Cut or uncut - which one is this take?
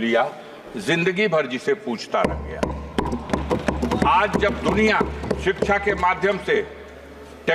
uncut